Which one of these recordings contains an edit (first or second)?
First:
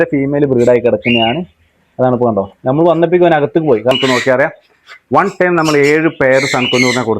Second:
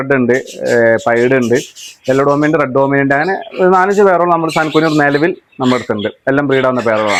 first